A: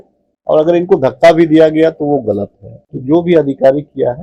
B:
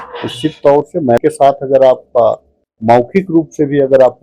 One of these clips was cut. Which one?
B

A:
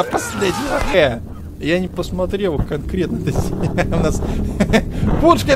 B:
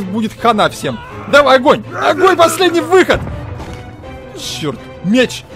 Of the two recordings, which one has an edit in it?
A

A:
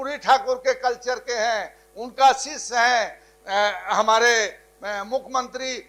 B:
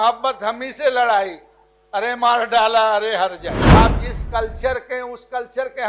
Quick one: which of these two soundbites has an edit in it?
B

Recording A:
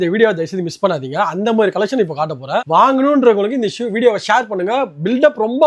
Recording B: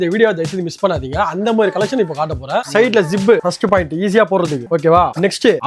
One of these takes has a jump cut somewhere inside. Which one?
B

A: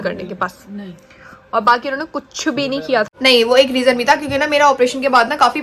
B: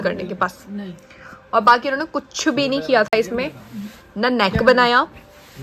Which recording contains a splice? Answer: A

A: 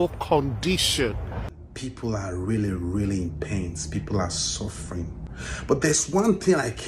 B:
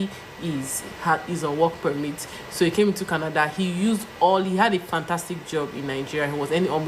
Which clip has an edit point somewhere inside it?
A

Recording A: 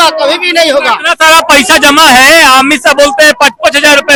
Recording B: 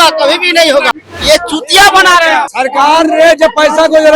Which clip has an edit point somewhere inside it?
B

